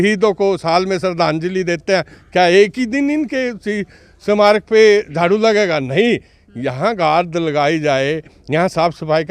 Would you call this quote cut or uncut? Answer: uncut